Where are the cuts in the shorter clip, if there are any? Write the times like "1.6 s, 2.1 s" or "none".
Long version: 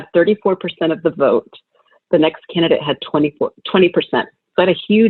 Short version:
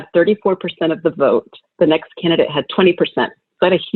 1.6 s, 2.7 s